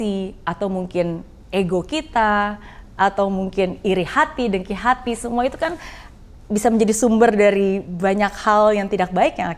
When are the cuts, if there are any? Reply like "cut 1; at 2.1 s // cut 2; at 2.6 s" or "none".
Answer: none